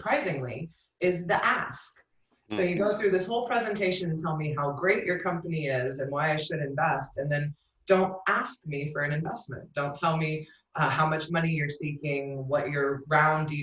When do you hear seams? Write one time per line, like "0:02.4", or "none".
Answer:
none